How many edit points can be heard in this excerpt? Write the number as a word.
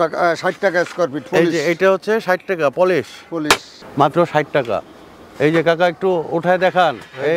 one